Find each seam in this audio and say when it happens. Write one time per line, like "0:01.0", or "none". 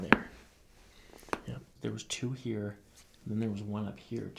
0:01.8

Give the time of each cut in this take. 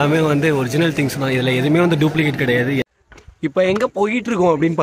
0:02.8

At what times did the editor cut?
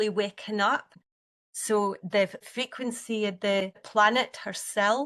0:01.0
0:02.5
0:03.8

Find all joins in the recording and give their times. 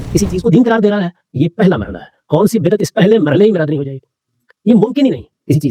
none

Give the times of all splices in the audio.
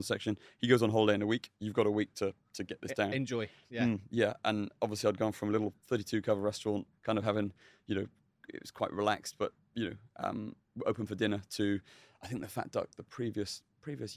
none

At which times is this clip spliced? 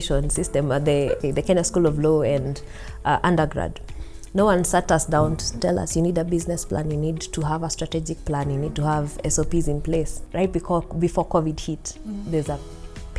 0:01.2
0:05.5
0:10.2

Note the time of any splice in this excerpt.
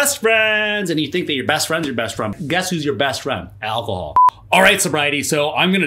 0:02.4
0:04.2

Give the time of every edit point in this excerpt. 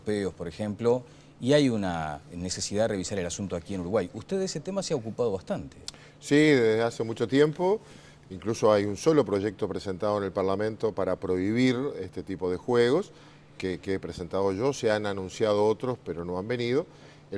0:15.0

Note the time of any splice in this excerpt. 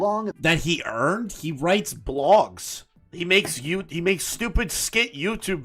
none

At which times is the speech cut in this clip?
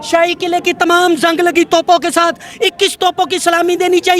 none

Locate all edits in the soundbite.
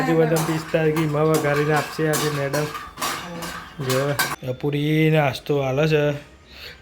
0:04.3

